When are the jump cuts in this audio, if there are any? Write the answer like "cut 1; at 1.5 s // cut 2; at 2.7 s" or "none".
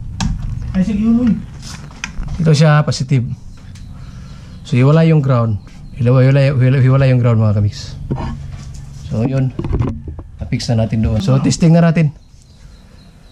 cut 1; at 11.2 s